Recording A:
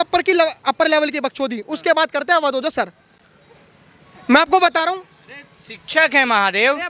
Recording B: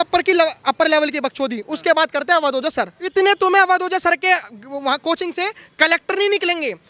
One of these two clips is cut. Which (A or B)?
B